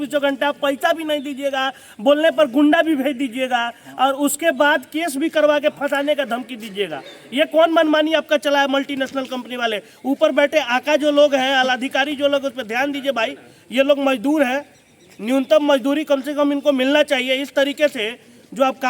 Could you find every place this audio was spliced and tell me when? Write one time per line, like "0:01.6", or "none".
none

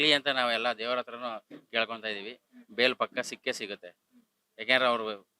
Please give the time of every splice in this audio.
none

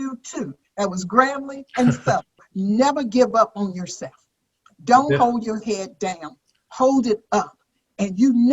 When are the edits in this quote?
0:02.4

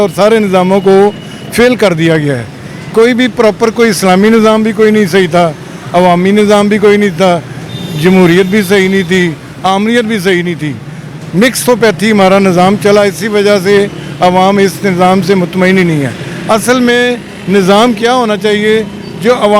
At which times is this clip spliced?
none

